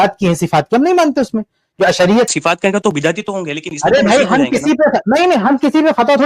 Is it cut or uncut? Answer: cut